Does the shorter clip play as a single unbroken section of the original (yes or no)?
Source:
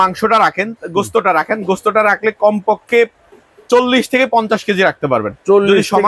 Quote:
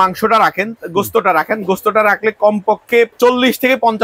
no